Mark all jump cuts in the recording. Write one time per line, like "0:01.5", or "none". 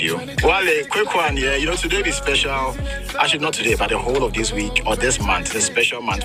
none